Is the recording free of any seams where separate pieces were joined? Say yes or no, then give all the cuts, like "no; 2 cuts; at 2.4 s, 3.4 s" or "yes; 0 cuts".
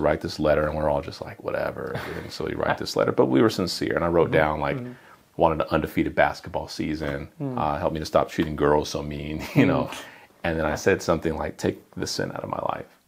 yes; 0 cuts